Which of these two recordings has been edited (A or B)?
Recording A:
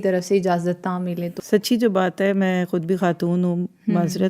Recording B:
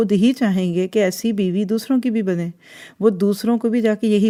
A